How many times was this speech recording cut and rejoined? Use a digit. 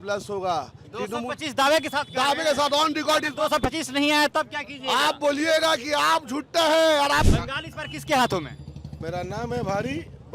1